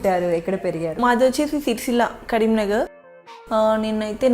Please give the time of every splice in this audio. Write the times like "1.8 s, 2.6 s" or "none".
1.0 s, 3.0 s